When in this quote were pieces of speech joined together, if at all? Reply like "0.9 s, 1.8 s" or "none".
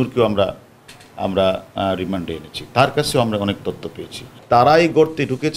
4.3 s